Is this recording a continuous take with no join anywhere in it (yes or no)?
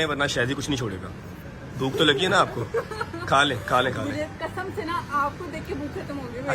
yes